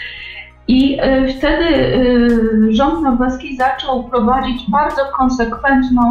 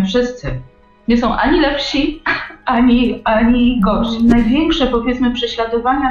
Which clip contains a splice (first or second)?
second